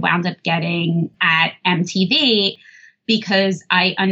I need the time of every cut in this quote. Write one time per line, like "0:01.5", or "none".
0:02.5